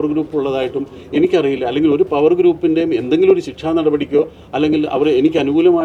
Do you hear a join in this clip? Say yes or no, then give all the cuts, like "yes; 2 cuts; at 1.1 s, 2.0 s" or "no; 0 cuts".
no; 0 cuts